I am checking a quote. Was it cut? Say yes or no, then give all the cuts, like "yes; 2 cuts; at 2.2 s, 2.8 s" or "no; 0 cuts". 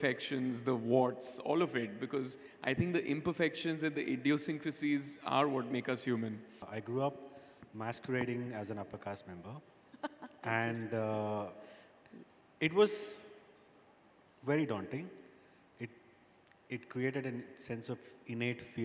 yes; 1 cut; at 6.7 s